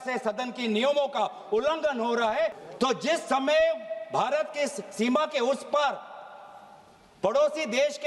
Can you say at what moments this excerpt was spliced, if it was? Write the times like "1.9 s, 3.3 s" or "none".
2.6 s